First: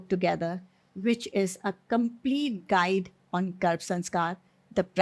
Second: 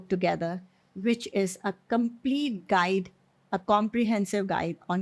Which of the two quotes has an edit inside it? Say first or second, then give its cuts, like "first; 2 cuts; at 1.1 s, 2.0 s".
first; 1 cut; at 3.2 s